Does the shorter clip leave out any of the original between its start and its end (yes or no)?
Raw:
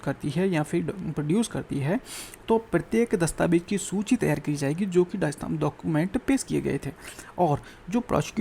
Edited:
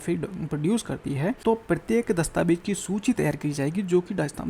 yes